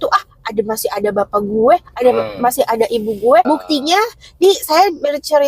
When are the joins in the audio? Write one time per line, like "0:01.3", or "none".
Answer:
0:03.5